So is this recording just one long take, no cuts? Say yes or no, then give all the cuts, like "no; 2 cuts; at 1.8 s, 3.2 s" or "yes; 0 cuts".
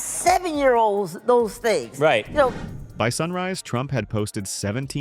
yes; 0 cuts